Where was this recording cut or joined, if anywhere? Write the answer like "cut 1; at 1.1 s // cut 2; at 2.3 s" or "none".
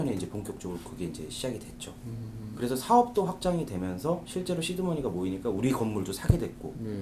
cut 1; at 2.5 s